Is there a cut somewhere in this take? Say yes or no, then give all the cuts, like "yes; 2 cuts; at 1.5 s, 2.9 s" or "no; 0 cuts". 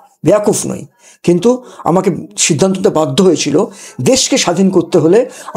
no; 0 cuts